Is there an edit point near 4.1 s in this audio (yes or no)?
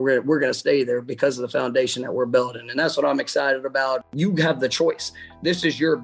yes